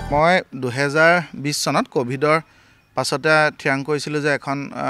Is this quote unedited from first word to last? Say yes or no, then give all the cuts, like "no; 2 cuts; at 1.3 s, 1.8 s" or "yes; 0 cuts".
yes; 0 cuts